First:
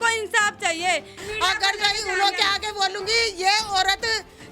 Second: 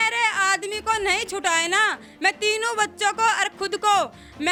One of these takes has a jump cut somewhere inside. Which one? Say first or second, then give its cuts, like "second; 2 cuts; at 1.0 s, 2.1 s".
first; 1 cut; at 1.1 s